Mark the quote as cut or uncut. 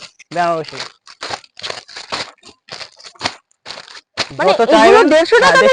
uncut